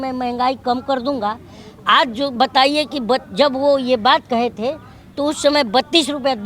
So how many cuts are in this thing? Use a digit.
0